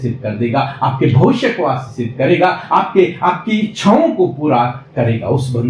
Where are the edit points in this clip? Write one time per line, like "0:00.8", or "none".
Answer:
none